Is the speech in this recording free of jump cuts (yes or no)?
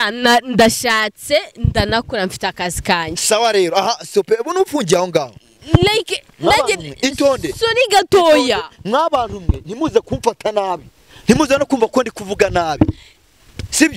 yes